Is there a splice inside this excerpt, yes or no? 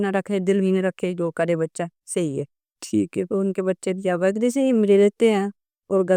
no